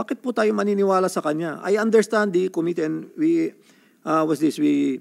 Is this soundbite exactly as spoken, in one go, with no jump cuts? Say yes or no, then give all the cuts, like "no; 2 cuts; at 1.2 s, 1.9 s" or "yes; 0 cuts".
yes; 0 cuts